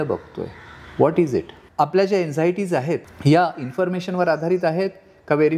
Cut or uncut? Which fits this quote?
cut